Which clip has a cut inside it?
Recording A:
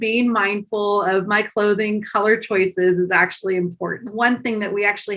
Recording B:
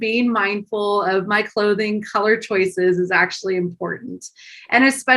A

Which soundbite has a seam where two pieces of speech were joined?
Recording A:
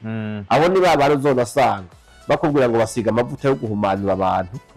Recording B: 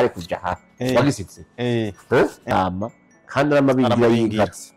B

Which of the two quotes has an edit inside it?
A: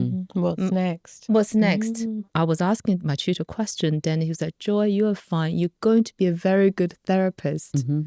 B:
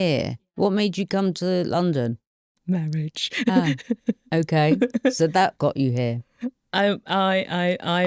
A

